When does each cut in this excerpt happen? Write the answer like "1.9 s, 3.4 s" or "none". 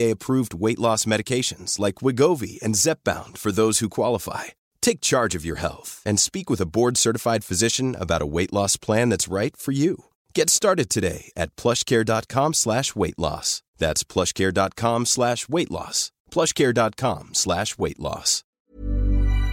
18.5 s